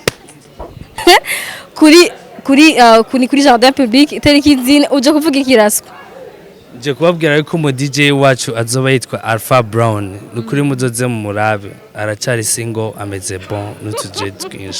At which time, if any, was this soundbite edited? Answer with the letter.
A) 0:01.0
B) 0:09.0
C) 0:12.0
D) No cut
A